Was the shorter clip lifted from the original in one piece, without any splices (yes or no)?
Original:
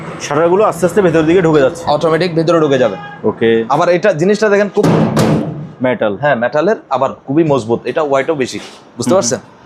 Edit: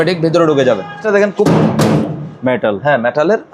no